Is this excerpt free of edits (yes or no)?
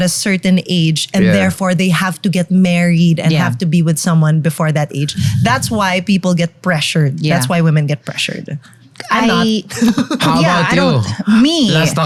yes